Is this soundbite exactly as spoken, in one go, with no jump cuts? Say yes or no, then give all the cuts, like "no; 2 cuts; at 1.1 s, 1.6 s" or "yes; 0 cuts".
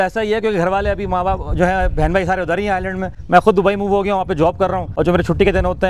no; 2 cuts; at 3.1 s, 4.8 s